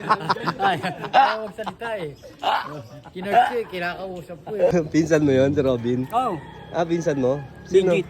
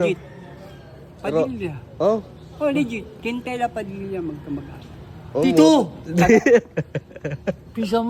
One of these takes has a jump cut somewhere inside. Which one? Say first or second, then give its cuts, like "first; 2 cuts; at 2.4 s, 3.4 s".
first; 1 cut; at 4.7 s